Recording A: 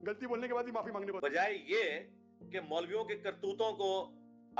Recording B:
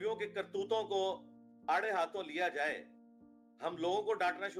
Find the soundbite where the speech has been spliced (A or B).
A